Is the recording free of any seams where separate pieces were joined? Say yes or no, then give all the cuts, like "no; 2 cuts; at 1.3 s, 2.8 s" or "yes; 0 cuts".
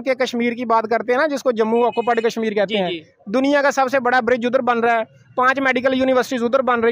yes; 0 cuts